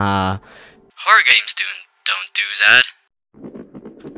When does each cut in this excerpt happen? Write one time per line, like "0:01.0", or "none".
0:03.2